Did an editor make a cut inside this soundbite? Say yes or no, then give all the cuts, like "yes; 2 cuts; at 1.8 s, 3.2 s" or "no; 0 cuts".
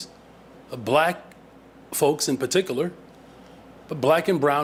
no; 0 cuts